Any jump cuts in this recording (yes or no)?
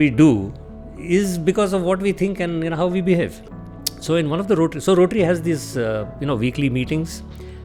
no